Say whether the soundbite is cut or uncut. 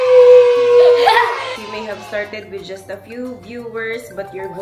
cut